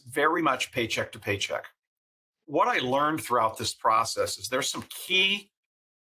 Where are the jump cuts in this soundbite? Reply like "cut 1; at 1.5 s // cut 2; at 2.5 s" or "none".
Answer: cut 1; at 2.3 s